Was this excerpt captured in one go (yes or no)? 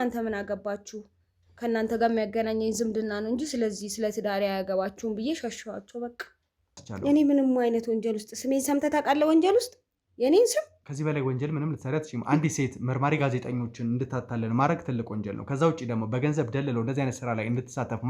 no